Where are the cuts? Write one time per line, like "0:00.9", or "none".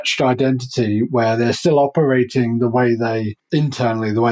0:03.4